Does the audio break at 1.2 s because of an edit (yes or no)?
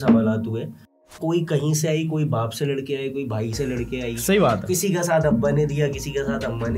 yes